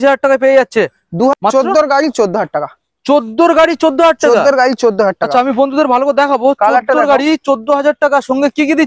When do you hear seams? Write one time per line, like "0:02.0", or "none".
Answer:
0:01.3

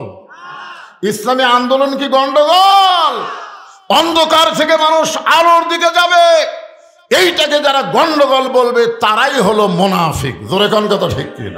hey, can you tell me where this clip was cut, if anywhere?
none

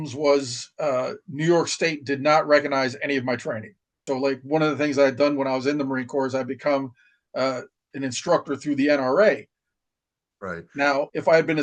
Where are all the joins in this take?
0:04.0

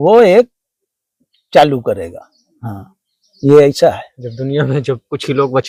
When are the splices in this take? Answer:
none

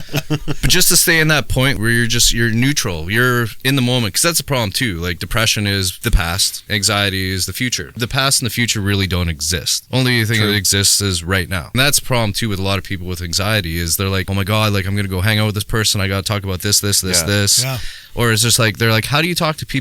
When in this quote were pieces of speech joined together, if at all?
0:01.7
0:06.3
0:07.9
0:09.7
0:11.7
0:14.3

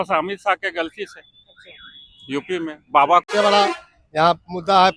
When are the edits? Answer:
0:03.3

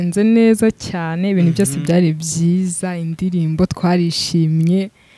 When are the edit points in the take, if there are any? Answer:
none

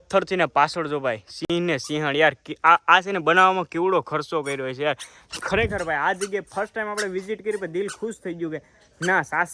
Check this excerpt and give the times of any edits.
none

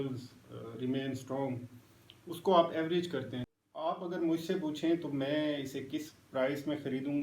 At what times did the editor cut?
0:03.4

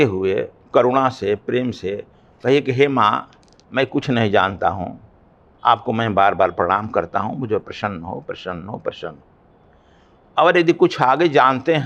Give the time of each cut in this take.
none

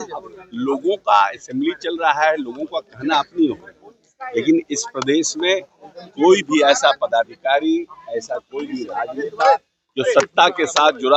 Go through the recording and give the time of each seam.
none

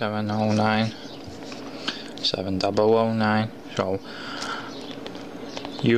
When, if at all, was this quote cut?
0:01.4

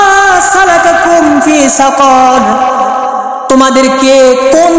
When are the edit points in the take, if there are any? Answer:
none

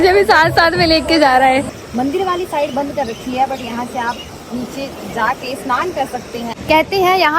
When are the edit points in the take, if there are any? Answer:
0:01.7
0:06.5

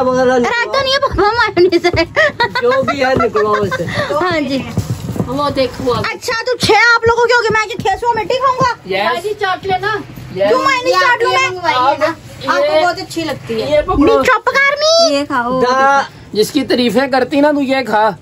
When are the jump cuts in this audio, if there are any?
0:01.1
0:13.6

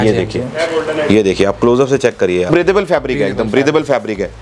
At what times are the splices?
0:02.5

